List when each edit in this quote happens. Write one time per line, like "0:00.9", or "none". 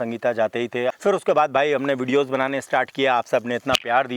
0:00.9